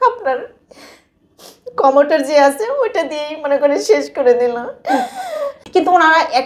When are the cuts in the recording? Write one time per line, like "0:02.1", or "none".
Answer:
0:05.6